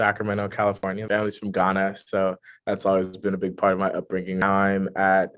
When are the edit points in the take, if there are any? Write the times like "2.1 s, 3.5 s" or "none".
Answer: 1.0 s, 4.4 s